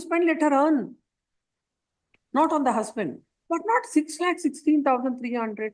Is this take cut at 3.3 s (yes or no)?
yes